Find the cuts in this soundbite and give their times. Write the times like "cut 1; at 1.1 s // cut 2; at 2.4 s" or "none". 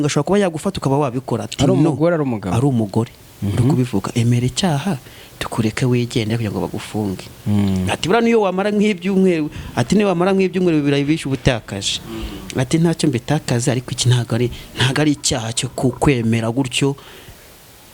none